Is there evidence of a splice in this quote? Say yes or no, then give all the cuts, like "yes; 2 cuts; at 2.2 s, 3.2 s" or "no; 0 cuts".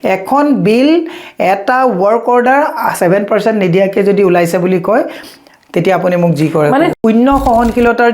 yes; 1 cut; at 7.0 s